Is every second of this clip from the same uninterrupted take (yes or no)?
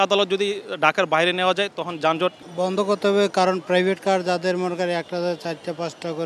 no